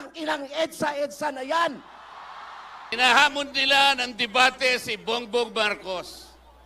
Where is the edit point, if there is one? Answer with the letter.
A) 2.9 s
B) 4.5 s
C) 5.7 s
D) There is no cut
A